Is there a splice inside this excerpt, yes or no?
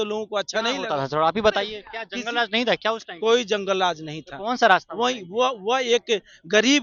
no